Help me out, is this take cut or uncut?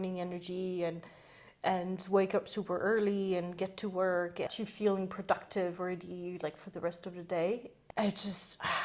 cut